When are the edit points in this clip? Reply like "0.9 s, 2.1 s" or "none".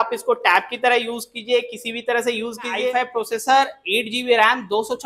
2.8 s